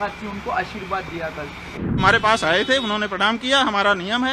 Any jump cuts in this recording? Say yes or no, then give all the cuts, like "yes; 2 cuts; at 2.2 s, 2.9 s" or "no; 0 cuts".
yes; 1 cut; at 2.0 s